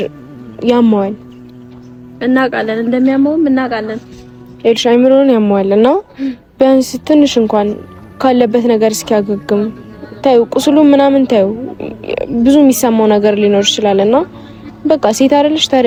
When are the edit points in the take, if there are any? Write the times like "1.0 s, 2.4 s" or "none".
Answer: none